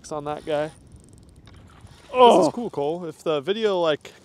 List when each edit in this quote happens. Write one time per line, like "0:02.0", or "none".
0:02.6